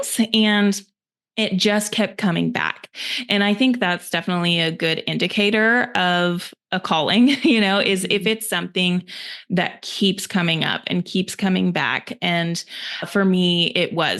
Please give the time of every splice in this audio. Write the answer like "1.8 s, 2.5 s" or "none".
none